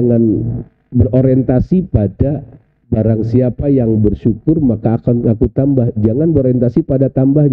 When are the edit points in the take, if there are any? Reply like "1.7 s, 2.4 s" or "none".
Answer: none